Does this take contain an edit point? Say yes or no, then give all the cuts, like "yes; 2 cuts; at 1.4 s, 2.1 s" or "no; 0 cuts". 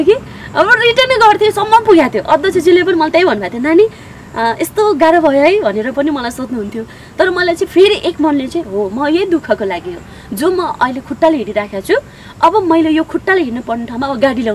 no; 0 cuts